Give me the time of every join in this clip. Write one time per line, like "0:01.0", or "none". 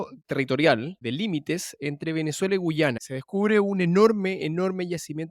0:01.0
0:03.0